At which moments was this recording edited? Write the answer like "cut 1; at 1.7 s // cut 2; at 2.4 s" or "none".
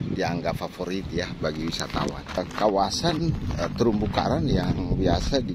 cut 1; at 2.4 s